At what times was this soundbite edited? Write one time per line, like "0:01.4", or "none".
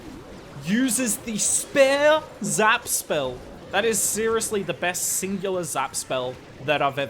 0:03.5